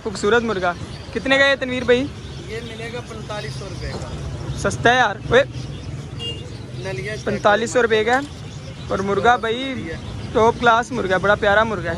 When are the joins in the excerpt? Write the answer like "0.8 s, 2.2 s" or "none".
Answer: none